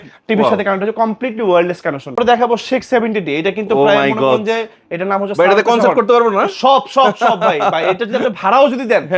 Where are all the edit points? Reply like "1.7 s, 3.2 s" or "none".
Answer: 2.1 s